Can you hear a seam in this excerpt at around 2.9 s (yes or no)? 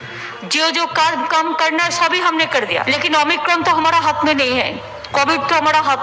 yes